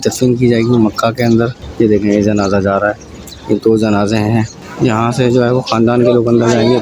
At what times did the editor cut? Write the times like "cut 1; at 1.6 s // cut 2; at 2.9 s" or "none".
cut 1; at 1.6 s // cut 2; at 4.6 s